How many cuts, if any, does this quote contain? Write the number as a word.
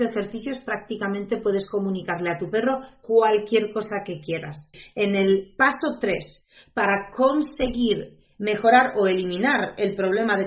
one